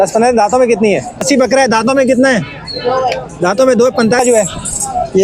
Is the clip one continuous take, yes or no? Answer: no